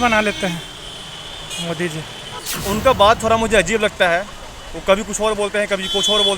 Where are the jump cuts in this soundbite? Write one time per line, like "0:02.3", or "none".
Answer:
0:02.5